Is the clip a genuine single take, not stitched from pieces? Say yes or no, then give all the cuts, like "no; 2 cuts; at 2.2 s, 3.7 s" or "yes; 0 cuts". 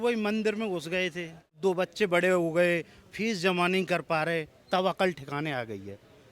no; 1 cut; at 1.6 s